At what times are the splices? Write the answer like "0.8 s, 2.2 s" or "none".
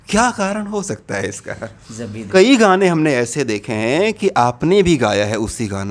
2.3 s